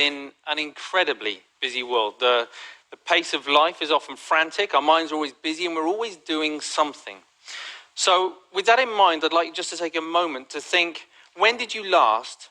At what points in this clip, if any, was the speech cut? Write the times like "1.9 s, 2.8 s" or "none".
2.5 s